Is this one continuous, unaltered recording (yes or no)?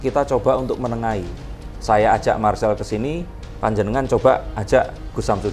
yes